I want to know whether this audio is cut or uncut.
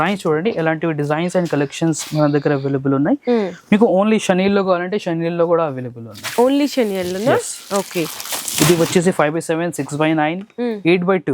uncut